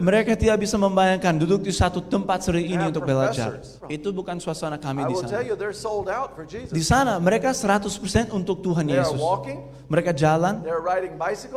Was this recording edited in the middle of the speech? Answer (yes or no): yes